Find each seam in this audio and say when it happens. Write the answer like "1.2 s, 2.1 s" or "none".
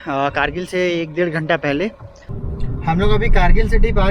2.5 s